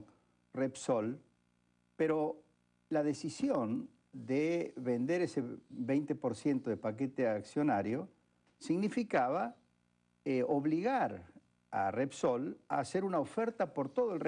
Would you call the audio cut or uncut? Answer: uncut